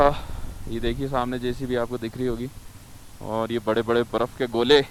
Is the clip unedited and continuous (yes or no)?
yes